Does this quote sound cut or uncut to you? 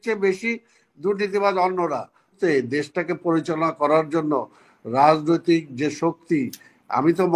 cut